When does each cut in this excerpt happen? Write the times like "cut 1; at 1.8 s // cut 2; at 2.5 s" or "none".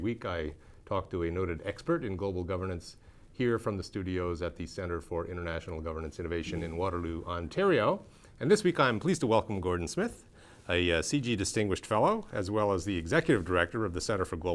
cut 1; at 2.4 s